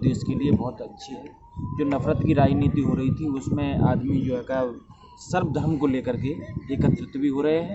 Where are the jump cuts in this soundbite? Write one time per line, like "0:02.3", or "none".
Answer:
none

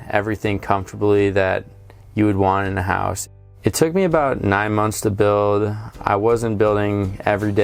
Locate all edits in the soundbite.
0:03.2

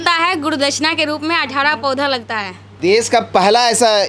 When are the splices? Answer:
0:02.6

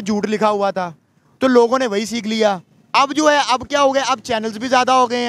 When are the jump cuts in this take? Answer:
none

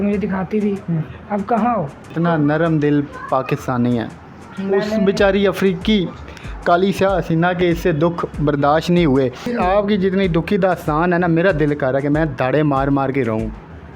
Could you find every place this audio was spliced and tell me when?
0:02.0
0:09.5

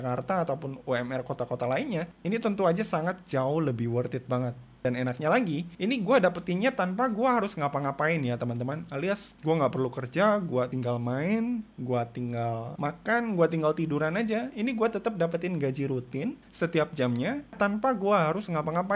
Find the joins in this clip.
0:04.8
0:17.6

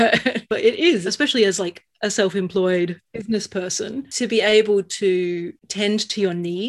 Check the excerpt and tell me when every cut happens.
0:03.1
0:05.6

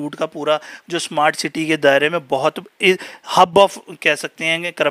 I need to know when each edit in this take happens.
none

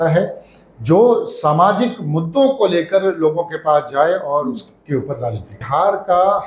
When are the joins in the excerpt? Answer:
0:05.6

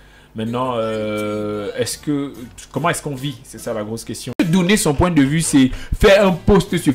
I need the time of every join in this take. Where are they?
0:04.3

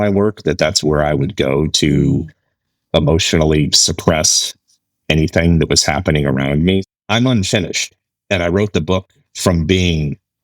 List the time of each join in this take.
0:06.9

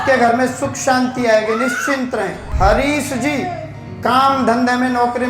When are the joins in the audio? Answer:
0:02.4

